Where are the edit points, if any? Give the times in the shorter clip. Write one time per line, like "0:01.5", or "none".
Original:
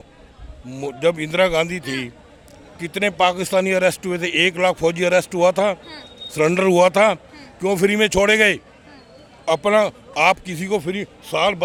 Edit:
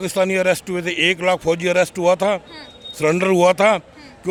none